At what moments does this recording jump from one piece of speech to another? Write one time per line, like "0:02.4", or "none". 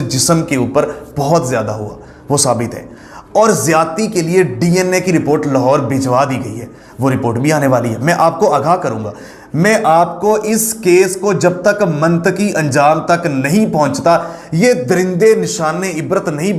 none